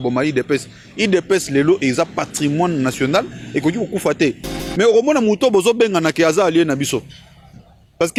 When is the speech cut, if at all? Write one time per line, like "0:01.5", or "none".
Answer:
none